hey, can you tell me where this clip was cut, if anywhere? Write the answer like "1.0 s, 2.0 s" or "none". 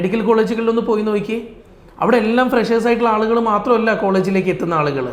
none